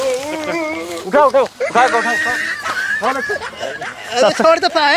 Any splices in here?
yes; 1 cut; at 0.9 s

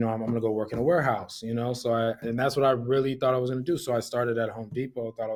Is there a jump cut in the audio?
no; 0 cuts

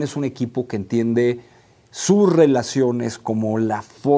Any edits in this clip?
no; 0 cuts

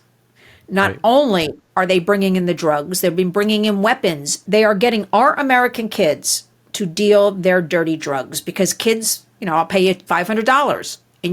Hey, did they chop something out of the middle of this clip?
yes; 1 cut; at 4.3 s

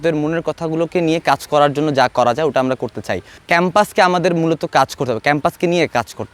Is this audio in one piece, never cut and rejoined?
yes; 0 cuts

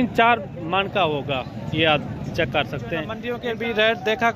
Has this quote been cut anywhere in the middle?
yes; 1 cut; at 3.2 s

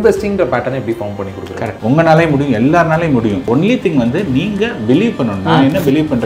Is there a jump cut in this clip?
yes; 2 cuts; at 1.7 s, 3.5 s

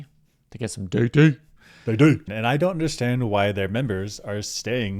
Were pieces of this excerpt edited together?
yes; 1 cut; at 2.2 s

